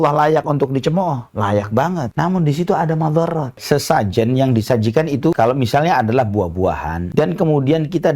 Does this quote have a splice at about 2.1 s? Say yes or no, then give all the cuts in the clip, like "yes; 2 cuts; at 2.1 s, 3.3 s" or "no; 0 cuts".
yes; 4 cuts; at 2.1 s, 3.5 s, 5.4 s, 7.0 s